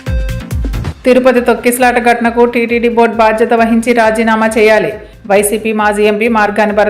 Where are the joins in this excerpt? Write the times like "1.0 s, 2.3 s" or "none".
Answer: none